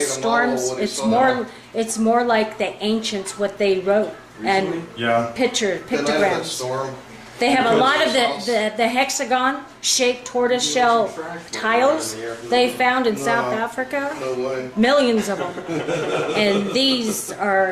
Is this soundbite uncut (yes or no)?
no